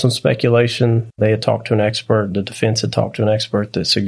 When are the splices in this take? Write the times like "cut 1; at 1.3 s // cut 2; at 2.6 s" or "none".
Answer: cut 1; at 1.1 s